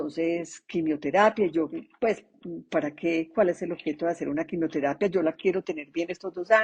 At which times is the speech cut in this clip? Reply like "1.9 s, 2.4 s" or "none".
1.7 s